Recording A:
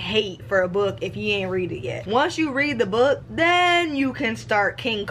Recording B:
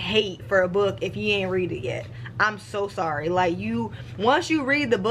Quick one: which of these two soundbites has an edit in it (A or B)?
A